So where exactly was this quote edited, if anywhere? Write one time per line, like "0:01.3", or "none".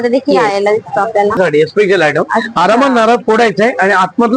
0:01.4